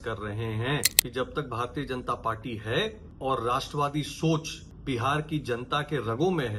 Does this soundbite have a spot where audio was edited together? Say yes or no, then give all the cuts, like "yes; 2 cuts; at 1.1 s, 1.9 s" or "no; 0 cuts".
yes; 1 cut; at 1.0 s